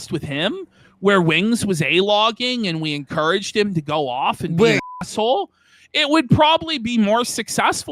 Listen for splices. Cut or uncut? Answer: uncut